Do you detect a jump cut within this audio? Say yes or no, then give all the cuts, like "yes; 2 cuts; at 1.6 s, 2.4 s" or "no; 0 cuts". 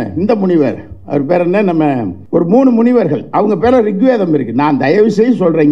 yes; 1 cut; at 2.2 s